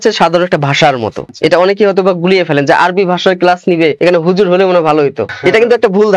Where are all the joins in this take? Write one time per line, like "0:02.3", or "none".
0:01.2
0:04.0
0:05.3